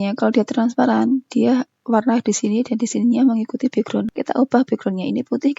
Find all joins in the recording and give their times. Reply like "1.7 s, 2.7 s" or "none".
4.1 s